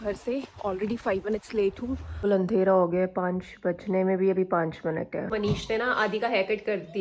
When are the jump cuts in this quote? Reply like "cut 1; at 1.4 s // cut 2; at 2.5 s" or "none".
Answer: cut 1; at 2.2 s // cut 2; at 5.3 s